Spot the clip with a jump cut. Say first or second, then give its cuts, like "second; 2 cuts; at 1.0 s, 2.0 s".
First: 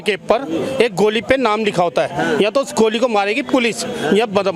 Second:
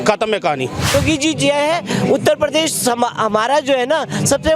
second; 1 cut; at 0.9 s